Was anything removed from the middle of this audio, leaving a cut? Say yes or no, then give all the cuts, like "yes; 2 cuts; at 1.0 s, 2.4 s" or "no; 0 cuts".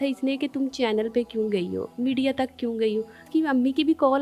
yes; 1 cut; at 3.3 s